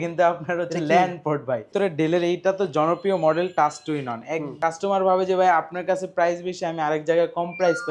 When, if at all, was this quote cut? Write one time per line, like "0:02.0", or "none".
0:01.7
0:04.5